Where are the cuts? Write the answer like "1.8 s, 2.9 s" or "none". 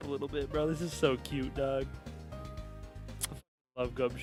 none